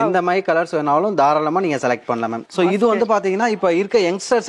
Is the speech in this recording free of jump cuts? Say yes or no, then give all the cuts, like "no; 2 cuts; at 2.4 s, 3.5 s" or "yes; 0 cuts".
no; 1 cut; at 2.5 s